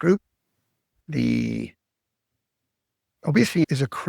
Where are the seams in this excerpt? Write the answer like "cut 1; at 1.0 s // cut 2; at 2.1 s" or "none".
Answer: cut 1; at 1.0 s